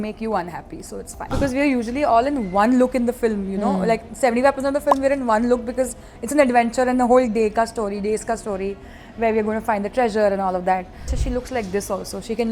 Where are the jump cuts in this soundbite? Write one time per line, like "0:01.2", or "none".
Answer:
0:01.3
0:11.2